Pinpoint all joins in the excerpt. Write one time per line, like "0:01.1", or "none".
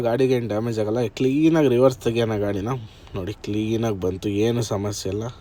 none

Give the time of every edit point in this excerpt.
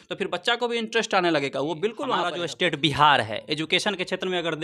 0:02.4

